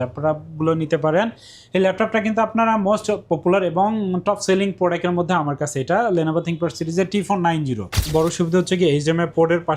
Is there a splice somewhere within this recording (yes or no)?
yes